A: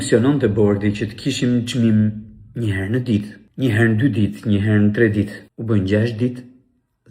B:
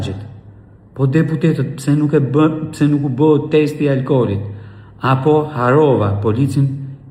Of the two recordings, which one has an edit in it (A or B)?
A